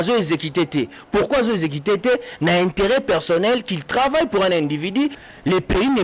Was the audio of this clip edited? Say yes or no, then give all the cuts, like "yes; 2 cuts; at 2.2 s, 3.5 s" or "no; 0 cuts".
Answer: no; 0 cuts